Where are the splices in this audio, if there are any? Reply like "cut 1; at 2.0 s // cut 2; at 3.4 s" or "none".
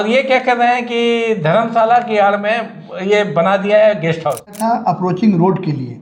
cut 1; at 4.6 s